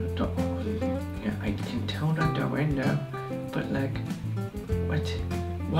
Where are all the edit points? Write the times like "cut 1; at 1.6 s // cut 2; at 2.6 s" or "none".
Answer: none

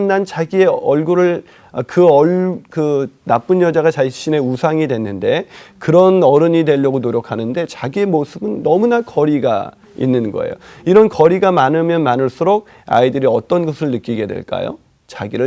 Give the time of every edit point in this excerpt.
none

